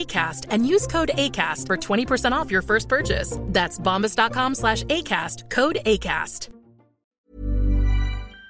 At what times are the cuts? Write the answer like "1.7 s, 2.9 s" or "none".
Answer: 7.2 s